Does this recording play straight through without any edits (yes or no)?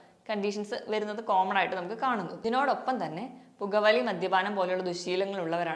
no